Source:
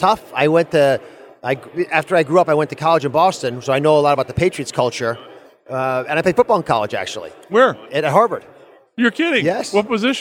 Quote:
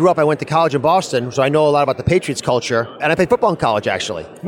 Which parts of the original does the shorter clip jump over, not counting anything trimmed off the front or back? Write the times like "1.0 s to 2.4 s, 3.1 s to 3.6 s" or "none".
5.3 s to 6.0 s